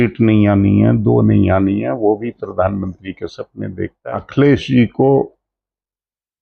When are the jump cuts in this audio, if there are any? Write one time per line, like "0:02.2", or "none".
0:04.0